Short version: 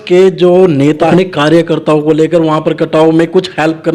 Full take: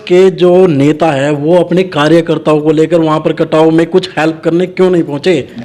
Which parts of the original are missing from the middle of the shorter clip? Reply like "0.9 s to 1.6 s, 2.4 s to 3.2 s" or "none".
1.1 s to 1.7 s